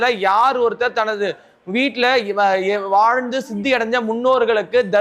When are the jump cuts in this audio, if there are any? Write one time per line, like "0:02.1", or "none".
none